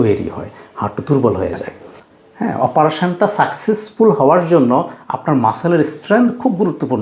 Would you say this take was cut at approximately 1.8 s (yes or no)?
yes